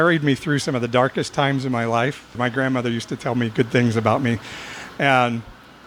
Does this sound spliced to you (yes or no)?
no